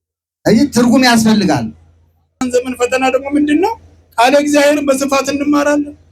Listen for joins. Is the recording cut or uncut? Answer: cut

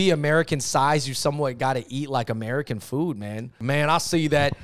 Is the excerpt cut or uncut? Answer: cut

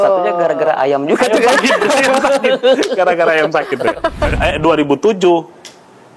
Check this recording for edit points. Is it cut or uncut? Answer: cut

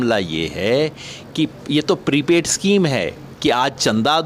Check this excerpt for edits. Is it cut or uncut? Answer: uncut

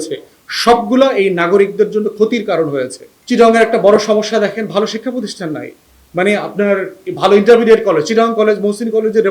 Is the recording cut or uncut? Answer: cut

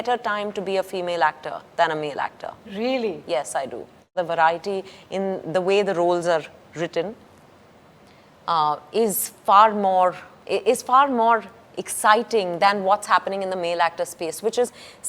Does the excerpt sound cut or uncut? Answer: cut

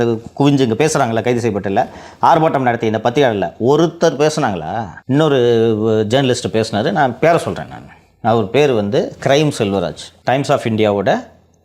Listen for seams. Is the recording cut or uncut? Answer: cut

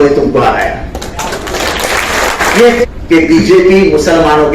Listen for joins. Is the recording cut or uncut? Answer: cut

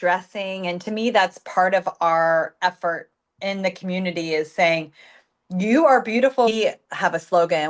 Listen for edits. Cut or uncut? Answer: cut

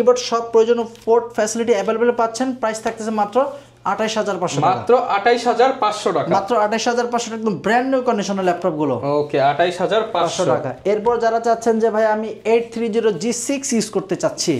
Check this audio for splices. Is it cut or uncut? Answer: uncut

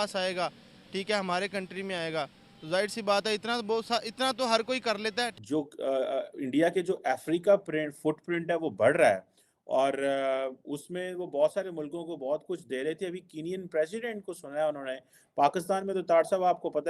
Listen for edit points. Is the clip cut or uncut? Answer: cut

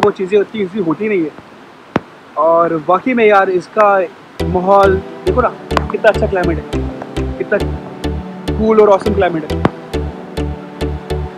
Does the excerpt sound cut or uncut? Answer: uncut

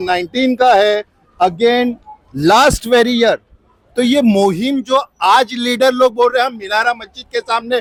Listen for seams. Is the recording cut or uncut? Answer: uncut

